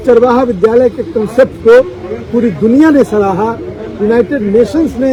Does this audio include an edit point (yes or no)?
no